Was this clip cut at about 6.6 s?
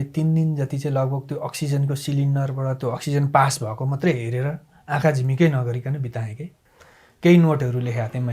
yes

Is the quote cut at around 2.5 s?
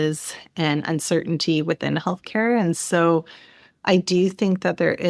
no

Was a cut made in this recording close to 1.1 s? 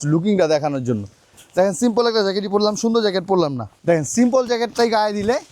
no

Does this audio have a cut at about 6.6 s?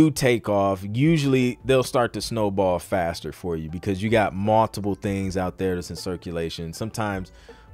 no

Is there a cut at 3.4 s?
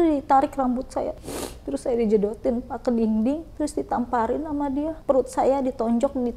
no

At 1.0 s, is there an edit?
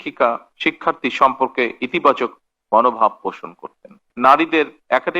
no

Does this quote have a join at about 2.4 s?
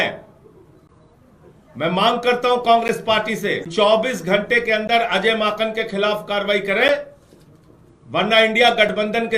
no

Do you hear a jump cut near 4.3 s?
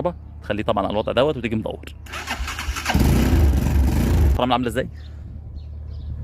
yes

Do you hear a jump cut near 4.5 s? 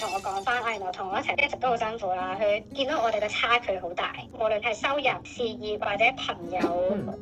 no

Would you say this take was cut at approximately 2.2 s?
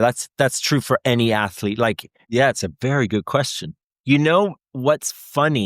yes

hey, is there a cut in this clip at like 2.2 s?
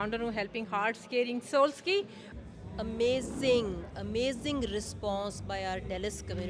yes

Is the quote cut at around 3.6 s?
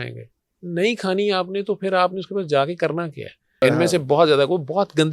yes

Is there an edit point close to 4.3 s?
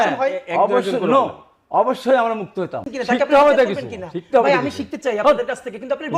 no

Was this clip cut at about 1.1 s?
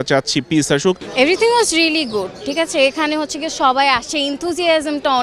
yes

